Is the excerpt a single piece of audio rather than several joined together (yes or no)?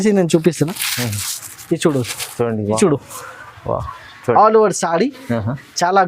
no